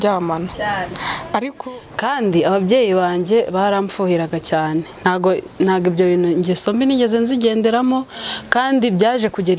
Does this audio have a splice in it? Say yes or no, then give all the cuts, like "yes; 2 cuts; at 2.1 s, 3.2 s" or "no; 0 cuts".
yes; 1 cut; at 1.5 s